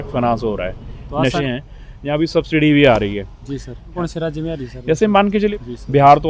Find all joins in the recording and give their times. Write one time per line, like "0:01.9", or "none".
0:01.4
0:03.9
0:05.5